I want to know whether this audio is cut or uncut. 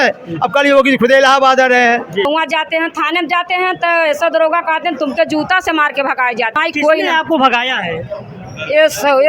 cut